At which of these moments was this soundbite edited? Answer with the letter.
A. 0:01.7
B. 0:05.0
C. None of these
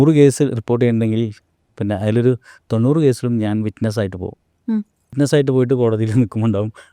B